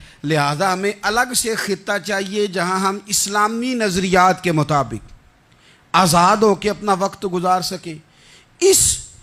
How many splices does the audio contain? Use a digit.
0